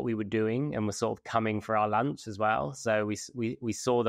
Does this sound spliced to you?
no; 0 cuts

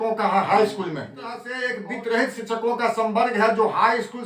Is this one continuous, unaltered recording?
no; 1 cut; at 1.5 s

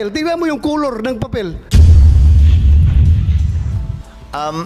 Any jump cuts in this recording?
yes; 2 cuts; at 1.6 s, 3.8 s

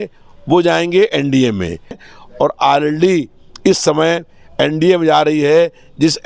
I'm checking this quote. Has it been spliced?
yes; 1 cut; at 2.0 s

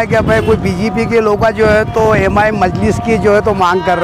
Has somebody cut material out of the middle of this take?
no; 0 cuts

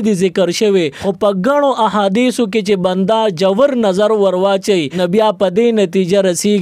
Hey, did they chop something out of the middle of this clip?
yes; 2 cuts; at 1.0 s, 4.9 s

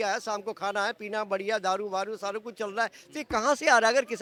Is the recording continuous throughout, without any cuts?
yes; 0 cuts

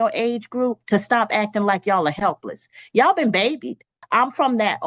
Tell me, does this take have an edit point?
yes; 1 cut; at 3.9 s

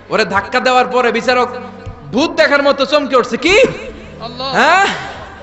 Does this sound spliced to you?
no; 0 cuts

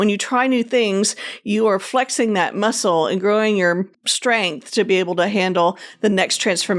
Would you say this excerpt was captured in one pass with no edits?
yes; 0 cuts

